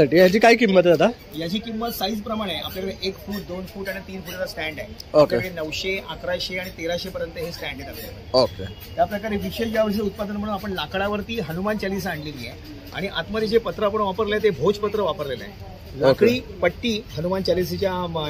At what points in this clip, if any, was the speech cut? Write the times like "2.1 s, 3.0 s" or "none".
none